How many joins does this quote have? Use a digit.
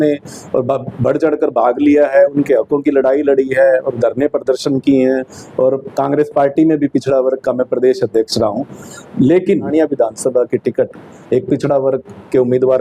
1